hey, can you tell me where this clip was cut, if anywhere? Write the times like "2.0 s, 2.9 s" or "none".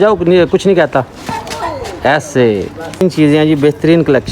3.0 s